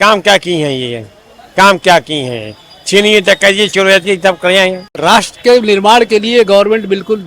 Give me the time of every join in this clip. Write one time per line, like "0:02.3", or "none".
0:05.0